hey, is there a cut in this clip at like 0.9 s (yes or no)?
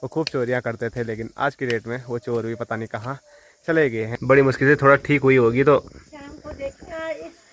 no